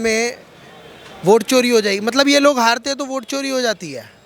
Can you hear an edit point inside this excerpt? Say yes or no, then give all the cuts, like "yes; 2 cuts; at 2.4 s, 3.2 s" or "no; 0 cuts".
no; 0 cuts